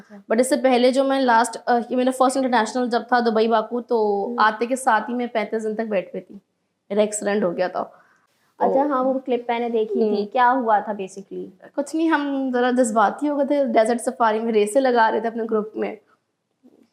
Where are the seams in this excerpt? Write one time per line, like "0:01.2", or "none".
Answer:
none